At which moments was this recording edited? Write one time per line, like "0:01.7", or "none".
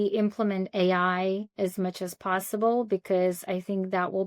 none